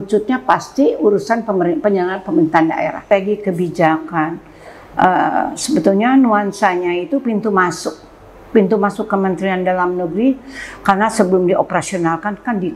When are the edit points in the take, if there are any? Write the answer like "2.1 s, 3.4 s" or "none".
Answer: 3.0 s